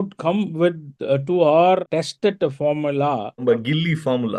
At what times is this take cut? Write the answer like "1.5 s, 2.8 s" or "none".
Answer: 1.8 s, 3.4 s